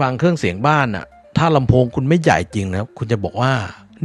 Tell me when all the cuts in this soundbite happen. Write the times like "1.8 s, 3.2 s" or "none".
none